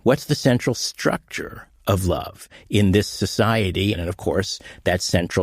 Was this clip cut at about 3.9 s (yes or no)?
yes